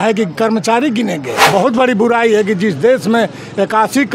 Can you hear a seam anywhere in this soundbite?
yes; 1 cut; at 1.5 s

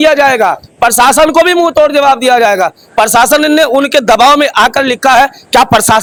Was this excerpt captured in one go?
yes; 0 cuts

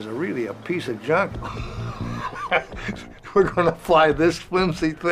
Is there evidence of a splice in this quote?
yes; 1 cut; at 4.2 s

